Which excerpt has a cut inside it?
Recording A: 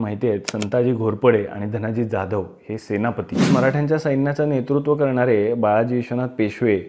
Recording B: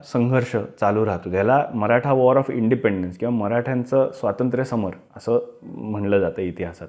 A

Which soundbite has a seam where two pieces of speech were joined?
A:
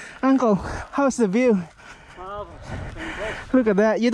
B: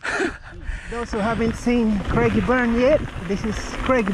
B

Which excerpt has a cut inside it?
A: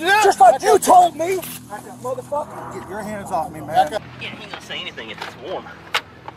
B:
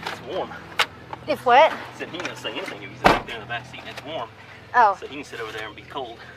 A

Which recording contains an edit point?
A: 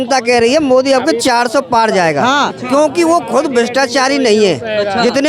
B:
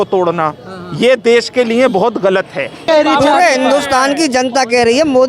B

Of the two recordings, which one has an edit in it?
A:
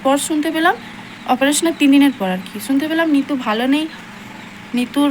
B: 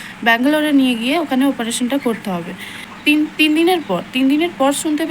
B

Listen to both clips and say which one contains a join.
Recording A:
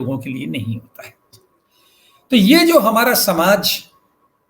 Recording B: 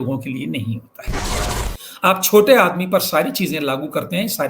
B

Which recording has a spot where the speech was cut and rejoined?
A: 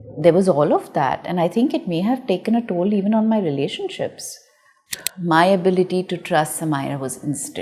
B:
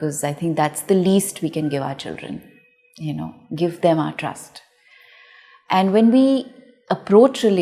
A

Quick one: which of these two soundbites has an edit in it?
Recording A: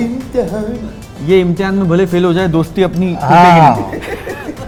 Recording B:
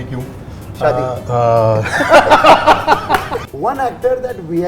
B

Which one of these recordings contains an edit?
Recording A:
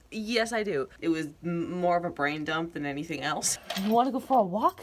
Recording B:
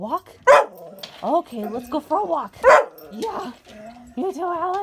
A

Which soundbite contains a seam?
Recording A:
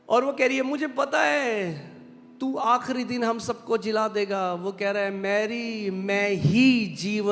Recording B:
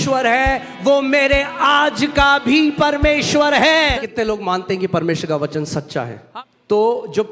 B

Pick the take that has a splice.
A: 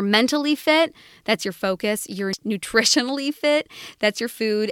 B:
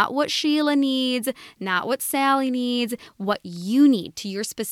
A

